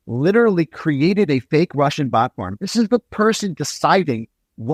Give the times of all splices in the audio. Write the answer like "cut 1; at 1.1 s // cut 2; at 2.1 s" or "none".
none